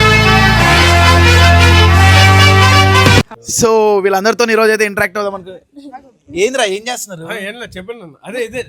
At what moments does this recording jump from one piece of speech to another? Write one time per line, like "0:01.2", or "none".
0:03.4